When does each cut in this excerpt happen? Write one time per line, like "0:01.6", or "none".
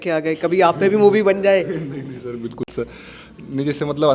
none